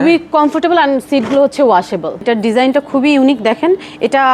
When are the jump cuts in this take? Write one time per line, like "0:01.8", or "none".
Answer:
0:02.2